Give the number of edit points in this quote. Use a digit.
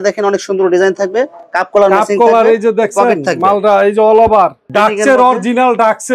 1